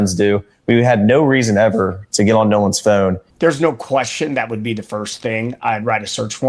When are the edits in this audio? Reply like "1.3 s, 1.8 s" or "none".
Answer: 3.3 s